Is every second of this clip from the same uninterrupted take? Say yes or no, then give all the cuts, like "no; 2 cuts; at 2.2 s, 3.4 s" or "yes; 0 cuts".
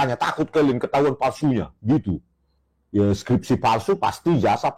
yes; 0 cuts